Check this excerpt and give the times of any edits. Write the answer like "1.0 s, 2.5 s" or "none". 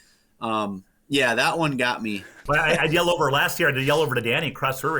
2.4 s